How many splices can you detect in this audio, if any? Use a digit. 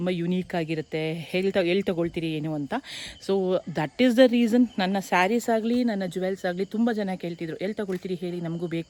0